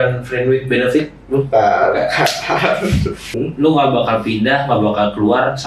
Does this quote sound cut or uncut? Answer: cut